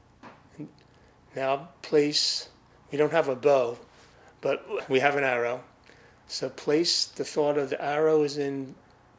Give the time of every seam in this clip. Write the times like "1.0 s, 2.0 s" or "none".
4.8 s